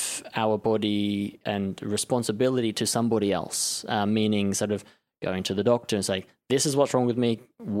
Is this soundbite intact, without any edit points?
no; 1 cut; at 1.4 s

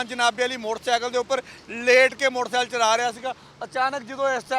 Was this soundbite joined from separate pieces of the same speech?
no; 0 cuts

